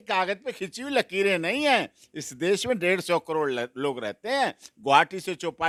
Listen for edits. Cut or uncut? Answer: uncut